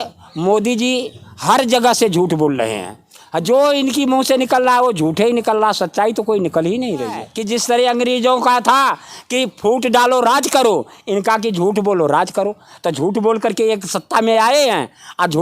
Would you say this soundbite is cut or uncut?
cut